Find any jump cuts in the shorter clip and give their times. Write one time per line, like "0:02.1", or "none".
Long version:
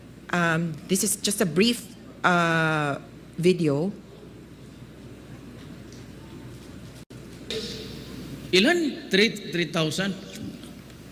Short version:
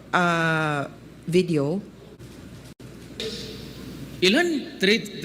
0:02.2